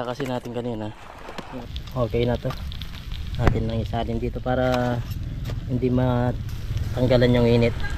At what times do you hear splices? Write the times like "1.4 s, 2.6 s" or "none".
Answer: 1.5 s